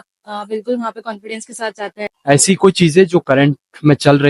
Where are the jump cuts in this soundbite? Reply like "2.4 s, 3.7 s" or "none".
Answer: 2.1 s